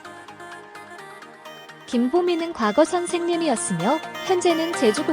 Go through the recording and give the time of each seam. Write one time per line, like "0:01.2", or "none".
0:01.9